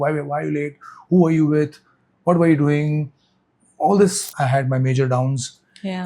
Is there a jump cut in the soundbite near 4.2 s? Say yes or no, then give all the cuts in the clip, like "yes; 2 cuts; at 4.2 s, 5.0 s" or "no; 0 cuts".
yes; 1 cut; at 4.2 s